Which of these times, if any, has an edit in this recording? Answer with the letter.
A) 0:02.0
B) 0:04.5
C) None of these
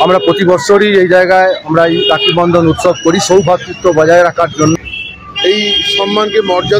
B